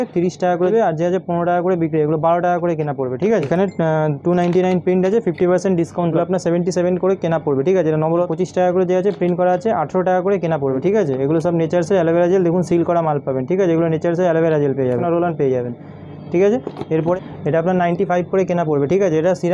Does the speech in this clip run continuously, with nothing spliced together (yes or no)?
no